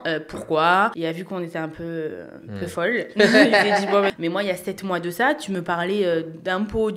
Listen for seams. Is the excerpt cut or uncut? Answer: cut